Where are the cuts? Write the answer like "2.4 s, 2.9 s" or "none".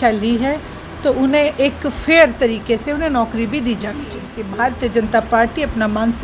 4.4 s